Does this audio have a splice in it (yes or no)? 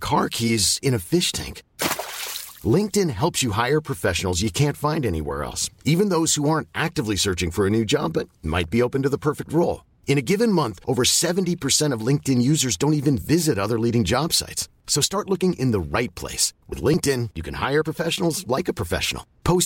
no